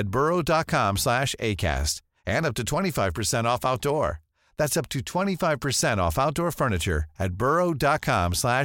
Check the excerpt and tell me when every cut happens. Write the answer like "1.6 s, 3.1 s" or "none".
none